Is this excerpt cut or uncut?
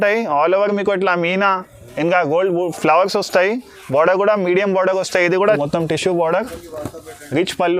cut